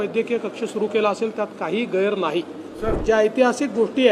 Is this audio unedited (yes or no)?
no